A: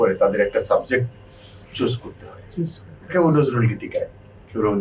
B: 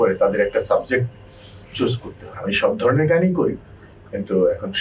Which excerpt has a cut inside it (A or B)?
B